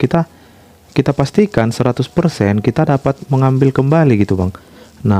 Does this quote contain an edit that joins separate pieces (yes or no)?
no